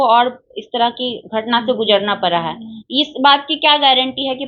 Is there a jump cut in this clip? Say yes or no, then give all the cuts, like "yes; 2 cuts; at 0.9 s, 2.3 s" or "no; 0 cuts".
no; 0 cuts